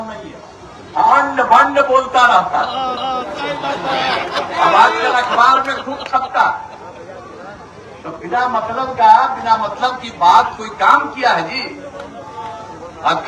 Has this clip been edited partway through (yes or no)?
no